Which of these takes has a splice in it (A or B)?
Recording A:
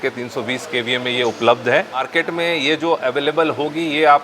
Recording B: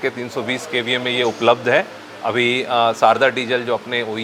A